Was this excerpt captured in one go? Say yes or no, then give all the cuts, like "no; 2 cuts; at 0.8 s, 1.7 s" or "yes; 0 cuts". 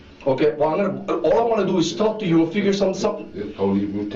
yes; 0 cuts